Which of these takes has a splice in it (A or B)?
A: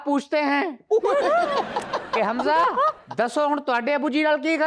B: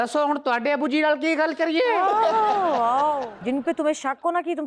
B